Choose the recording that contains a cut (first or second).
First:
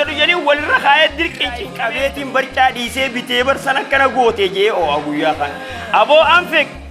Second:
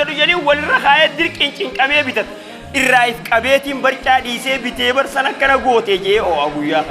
first